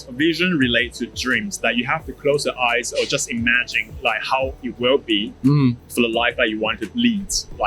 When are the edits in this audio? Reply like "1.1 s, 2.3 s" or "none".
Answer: none